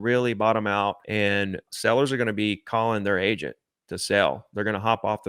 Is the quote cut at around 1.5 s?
yes; 1 cut; at 1.5 s

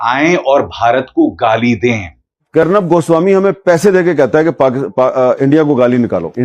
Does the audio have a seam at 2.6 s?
yes; 1 cut; at 2.6 s

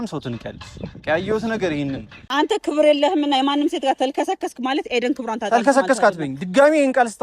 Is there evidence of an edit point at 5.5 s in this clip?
no; 1 cut; at 2.2 s

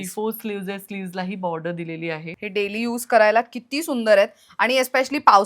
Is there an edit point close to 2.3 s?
yes; 1 cut; at 2.3 s

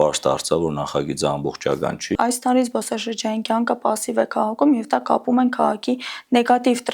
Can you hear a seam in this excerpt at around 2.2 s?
yes; 1 cut; at 2.2 s

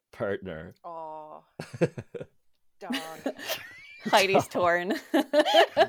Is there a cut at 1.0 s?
yes; 1 cut; at 1.0 s

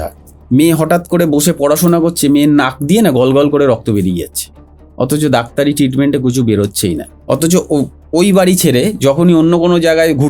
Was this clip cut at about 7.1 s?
yes; 1 cut; at 7.1 s

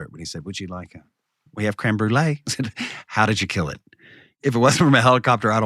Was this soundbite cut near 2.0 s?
no; 1 cut; at 4.3 s

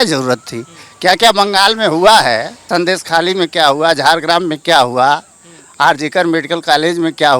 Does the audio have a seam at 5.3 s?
no; 1 cut; at 2.5 s

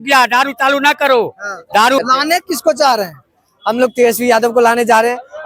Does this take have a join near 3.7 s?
no; 1 cut; at 2.0 s

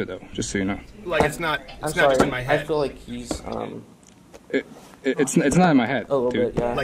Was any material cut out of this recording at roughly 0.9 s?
yes; 1 cut; at 0.9 s

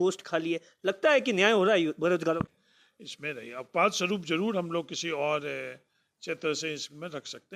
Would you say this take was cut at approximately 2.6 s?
yes; 1 cut; at 2.6 s

